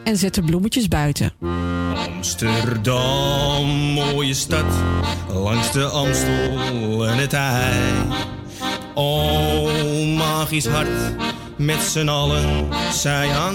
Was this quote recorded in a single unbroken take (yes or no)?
yes